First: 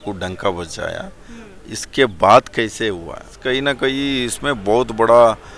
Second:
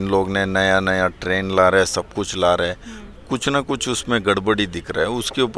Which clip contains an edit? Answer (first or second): first